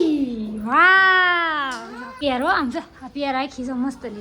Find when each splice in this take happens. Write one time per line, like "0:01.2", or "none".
0:02.0